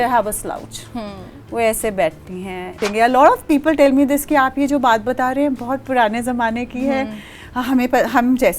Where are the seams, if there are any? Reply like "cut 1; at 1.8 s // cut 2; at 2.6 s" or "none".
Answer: cut 1; at 2.8 s